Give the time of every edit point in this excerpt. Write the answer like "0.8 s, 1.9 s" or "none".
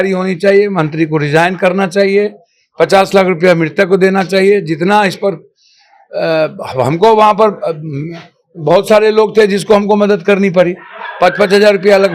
none